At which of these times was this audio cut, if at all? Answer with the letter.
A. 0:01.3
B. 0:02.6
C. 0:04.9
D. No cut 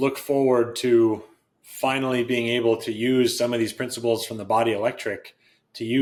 D